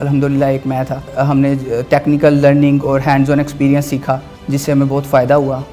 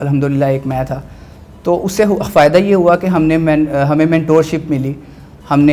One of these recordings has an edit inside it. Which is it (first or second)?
first